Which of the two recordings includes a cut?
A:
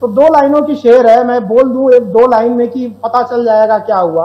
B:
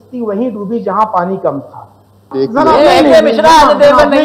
B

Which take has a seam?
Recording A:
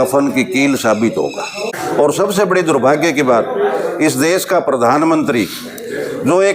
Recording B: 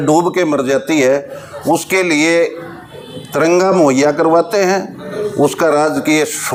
A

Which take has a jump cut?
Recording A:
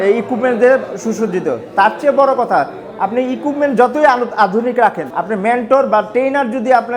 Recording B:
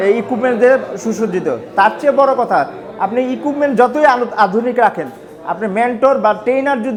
A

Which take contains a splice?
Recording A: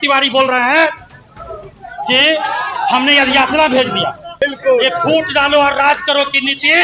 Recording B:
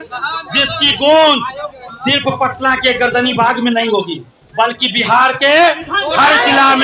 A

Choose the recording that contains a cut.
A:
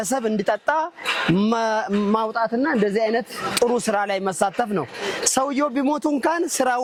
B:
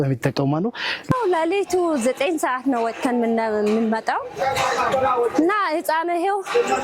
B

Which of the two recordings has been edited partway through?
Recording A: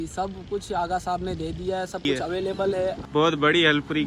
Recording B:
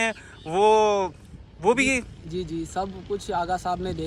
A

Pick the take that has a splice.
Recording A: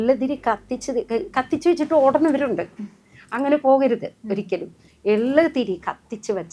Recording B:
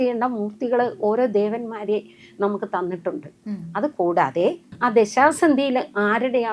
B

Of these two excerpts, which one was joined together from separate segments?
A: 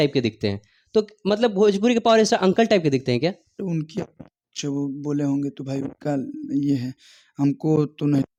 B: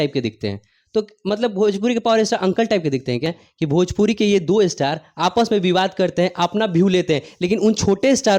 B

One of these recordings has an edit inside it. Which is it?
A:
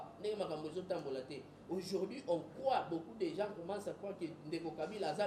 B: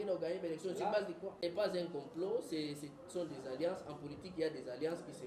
B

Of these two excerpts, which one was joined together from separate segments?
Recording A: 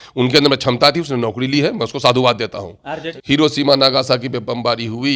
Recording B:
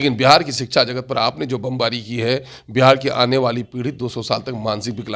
A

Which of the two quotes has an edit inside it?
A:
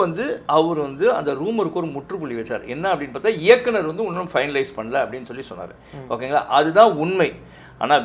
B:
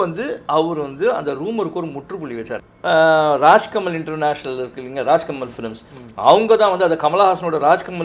B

